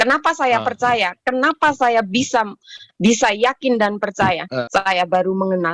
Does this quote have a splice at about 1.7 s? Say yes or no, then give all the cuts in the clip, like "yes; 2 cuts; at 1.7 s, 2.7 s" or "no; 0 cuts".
no; 1 cut; at 4.5 s